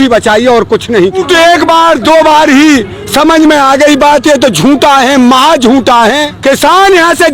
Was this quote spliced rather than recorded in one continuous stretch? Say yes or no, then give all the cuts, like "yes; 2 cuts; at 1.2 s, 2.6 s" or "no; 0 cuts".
yes; 2 cuts; at 1.2 s, 6.3 s